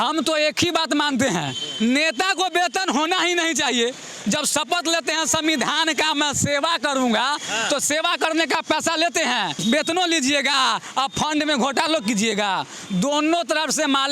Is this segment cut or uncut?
cut